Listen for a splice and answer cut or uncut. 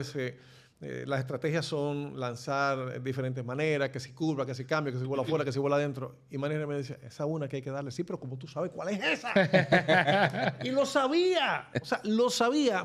uncut